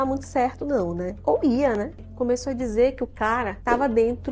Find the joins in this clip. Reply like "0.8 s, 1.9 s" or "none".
2.1 s